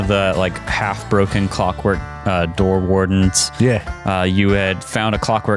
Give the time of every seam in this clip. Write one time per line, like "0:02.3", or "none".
none